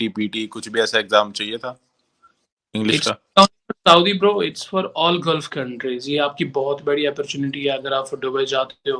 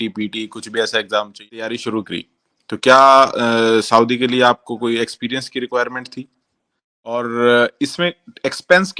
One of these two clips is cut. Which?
second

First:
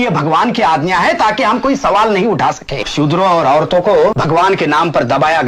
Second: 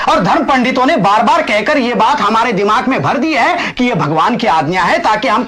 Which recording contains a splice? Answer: first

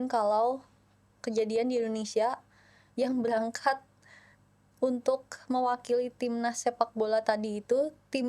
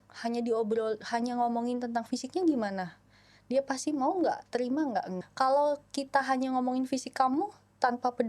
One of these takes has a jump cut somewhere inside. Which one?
second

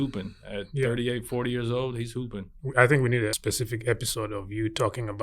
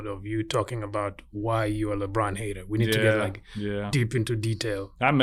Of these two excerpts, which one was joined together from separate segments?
first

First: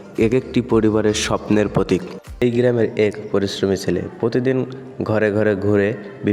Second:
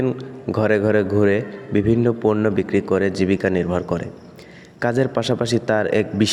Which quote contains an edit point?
first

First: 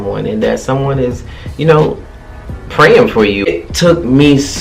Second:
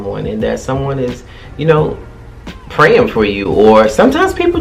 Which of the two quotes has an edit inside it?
first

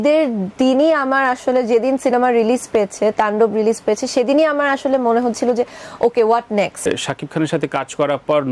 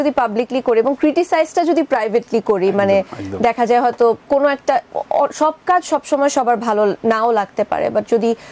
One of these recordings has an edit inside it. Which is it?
first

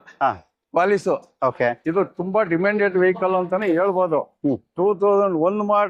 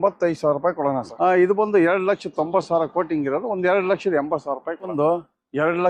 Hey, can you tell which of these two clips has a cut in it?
second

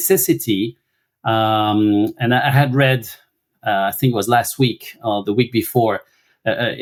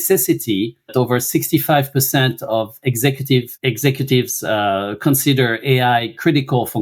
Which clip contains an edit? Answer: second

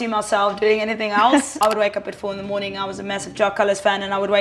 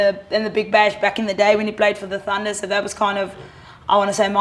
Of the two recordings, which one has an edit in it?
first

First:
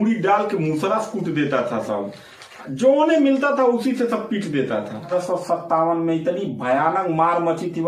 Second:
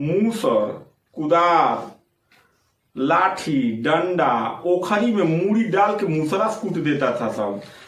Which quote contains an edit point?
first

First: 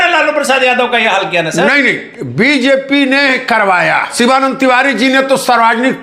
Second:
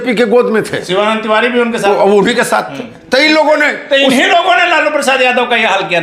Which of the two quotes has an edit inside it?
first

